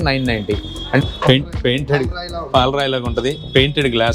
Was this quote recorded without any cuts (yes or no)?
no